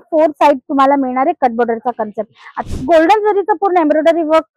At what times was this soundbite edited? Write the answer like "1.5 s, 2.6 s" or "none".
2.6 s

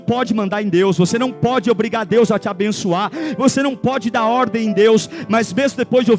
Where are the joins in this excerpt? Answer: 1.1 s

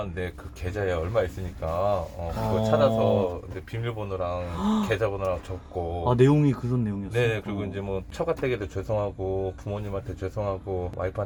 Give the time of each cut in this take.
none

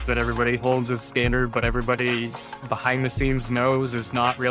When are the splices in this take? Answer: none

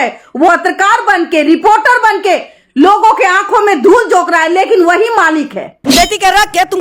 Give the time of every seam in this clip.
5.7 s

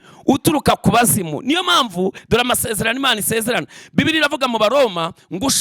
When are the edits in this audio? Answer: 2.2 s

